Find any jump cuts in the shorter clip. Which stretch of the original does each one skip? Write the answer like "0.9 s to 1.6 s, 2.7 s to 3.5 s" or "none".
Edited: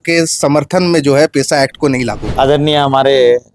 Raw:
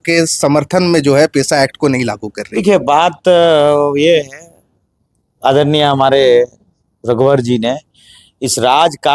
2.2 s to 5.3 s